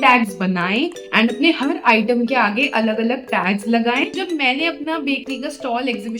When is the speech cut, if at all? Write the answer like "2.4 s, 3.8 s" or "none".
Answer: 4.3 s